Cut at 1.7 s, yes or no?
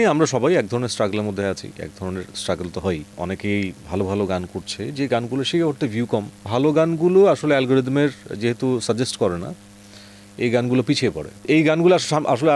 no